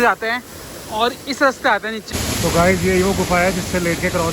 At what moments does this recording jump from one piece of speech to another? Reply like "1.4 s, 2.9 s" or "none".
2.0 s